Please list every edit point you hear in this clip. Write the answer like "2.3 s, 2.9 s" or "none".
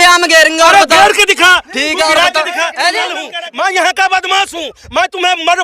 3.2 s